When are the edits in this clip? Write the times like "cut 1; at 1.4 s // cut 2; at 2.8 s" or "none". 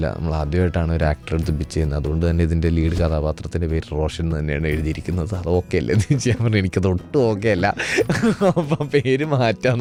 none